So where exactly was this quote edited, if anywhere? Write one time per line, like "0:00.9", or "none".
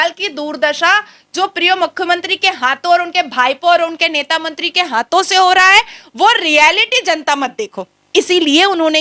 none